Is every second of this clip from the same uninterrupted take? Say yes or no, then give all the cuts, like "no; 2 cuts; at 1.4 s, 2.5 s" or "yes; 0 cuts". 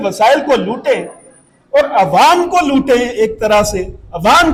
yes; 0 cuts